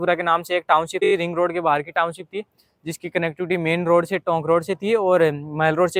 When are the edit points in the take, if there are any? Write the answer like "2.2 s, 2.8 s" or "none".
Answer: none